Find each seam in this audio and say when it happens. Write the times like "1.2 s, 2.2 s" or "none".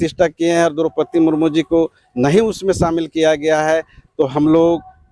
none

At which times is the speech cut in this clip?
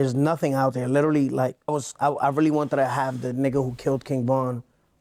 1.7 s

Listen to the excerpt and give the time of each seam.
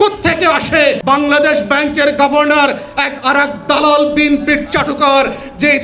1.0 s

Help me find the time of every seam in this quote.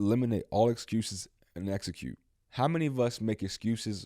2.3 s

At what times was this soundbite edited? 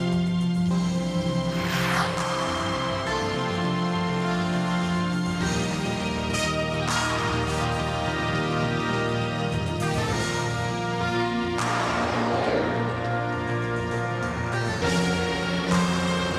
none

